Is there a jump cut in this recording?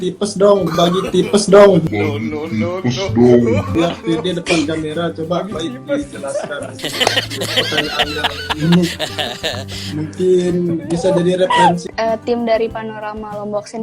yes; 1 cut; at 11.8 s

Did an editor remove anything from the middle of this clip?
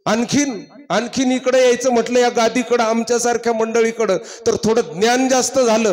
no; 0 cuts

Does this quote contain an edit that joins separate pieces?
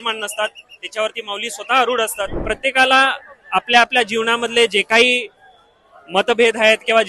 yes; 1 cut; at 2.4 s

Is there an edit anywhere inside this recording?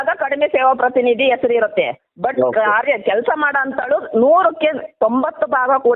no; 0 cuts

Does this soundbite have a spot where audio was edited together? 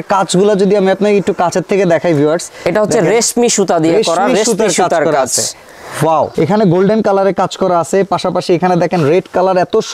yes; 1 cut; at 6.3 s

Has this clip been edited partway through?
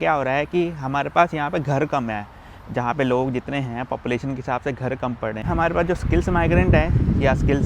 yes; 1 cut; at 5.4 s

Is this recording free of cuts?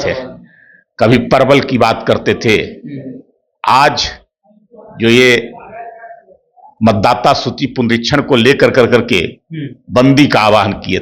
yes; 0 cuts

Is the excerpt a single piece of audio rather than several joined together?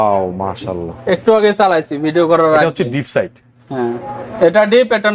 yes; 0 cuts

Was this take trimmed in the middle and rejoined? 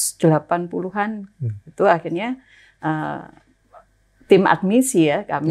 no; 0 cuts

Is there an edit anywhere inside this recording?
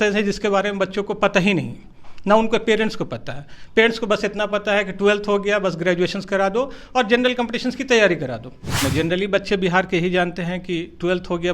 yes; 1 cut; at 8.8 s

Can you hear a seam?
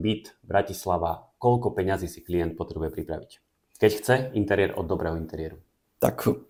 no; 0 cuts

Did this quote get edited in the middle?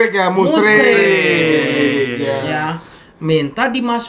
no; 0 cuts

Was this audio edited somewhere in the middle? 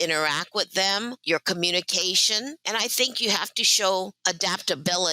yes; 3 cuts; at 1.2 s, 2.6 s, 4.2 s

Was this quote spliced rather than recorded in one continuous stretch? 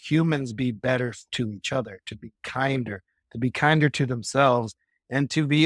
yes; 1 cut; at 1.2 s

